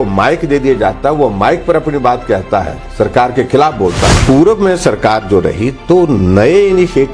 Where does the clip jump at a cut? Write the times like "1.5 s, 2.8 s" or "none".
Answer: 4.1 s